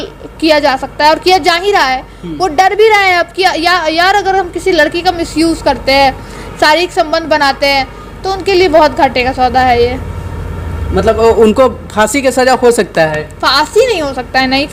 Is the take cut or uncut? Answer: uncut